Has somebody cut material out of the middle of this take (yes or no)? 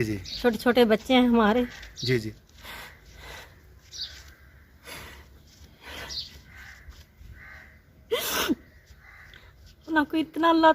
no